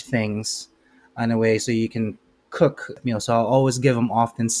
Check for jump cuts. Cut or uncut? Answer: cut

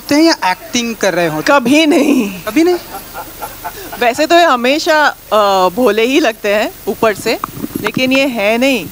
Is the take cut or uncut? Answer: uncut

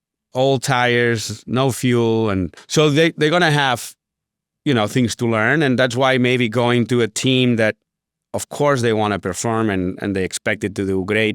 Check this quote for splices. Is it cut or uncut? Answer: cut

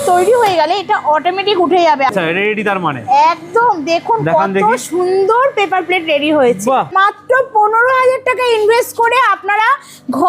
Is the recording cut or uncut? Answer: cut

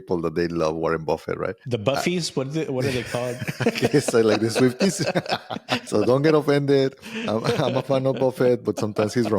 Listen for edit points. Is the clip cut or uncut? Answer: cut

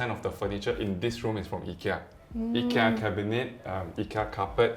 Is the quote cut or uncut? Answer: uncut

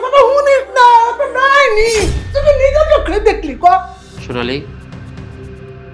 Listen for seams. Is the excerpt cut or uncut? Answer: uncut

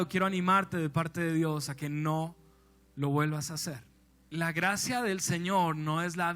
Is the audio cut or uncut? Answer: cut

